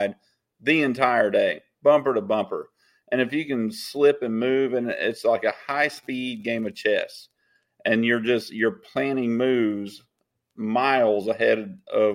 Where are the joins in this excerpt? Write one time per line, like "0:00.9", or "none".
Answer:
none